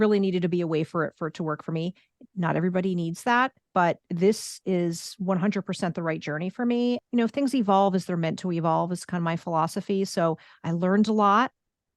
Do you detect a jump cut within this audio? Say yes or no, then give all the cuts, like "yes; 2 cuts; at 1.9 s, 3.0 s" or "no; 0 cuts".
yes; 1 cut; at 7.0 s